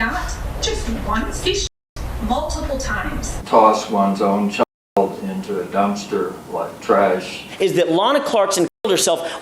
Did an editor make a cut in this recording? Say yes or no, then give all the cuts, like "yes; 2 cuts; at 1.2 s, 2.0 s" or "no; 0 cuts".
yes; 3 cuts; at 1.4 s, 3.4 s, 7.4 s